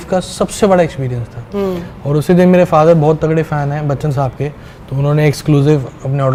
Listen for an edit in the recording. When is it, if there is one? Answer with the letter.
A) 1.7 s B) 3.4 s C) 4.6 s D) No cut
D